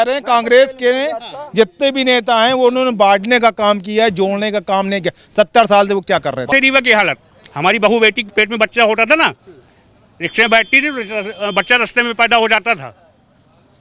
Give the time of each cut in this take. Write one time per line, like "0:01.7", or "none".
0:06.5